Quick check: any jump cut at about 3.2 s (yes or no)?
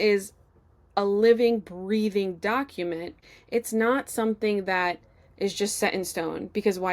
yes